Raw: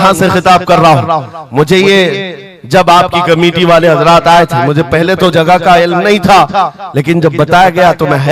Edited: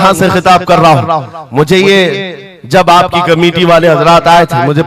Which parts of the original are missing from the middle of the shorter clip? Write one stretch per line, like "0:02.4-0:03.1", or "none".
none